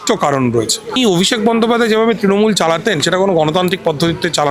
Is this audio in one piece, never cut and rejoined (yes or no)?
no